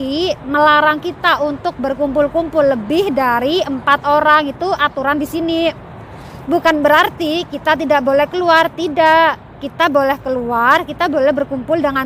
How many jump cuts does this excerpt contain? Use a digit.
0